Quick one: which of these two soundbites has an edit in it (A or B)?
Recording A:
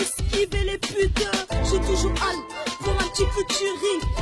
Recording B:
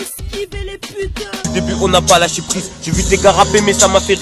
B